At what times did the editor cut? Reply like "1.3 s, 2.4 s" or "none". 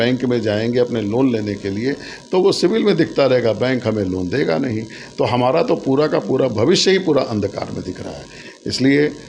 none